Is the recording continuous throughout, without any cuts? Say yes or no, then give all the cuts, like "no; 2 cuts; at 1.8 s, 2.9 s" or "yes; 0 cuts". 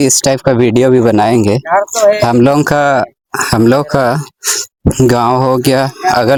yes; 0 cuts